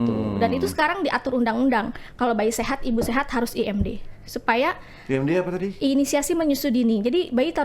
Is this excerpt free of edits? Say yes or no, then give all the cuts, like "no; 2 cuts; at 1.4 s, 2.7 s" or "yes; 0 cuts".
yes; 0 cuts